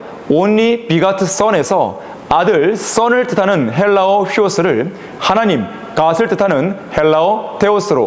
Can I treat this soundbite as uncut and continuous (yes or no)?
yes